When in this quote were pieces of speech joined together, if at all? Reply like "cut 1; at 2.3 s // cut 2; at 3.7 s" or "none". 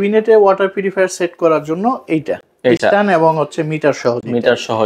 none

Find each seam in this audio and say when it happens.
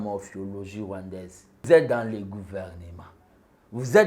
cut 1; at 1.6 s

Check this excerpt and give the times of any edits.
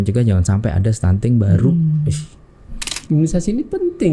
cut 1; at 2.8 s

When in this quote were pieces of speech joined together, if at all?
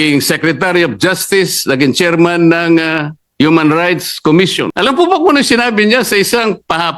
cut 1; at 4.7 s

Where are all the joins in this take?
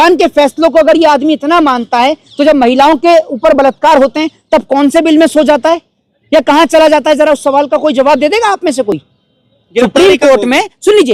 none

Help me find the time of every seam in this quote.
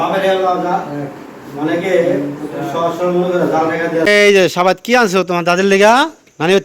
cut 1; at 4.0 s

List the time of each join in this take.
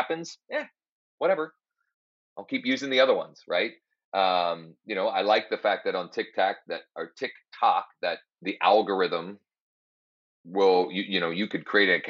cut 1; at 8.3 s

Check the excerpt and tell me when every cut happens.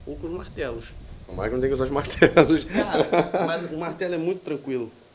none

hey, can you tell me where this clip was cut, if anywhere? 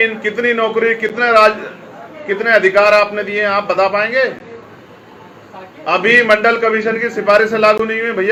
none

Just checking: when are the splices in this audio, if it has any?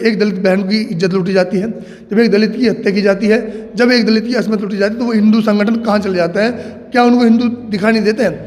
none

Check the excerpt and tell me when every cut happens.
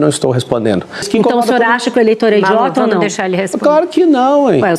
cut 1; at 1.0 s

